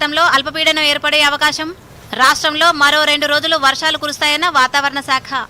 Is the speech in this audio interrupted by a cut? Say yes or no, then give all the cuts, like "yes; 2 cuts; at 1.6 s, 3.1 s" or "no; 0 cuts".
no; 0 cuts